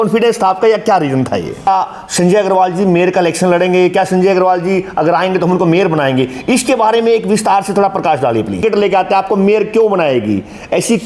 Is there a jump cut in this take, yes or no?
yes